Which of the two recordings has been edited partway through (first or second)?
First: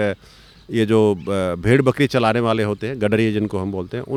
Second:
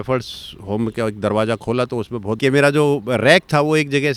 second